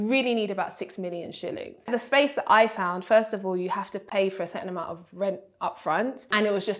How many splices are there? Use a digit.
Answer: 1